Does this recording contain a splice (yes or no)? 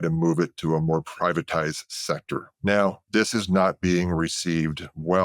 yes